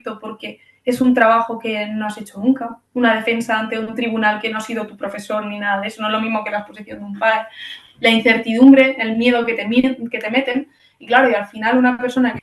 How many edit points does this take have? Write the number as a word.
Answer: zero